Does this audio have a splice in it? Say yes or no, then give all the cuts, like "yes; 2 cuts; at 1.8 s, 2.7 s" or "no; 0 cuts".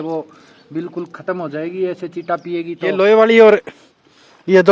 yes; 1 cut; at 2.9 s